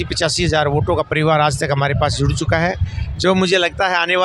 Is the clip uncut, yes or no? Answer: yes